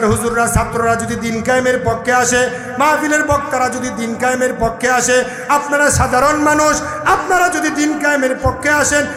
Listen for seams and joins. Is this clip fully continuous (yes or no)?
yes